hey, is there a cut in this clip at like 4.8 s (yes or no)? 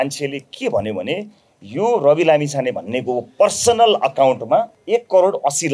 yes